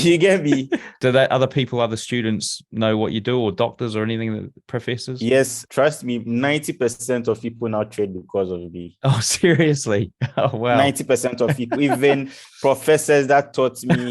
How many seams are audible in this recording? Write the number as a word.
two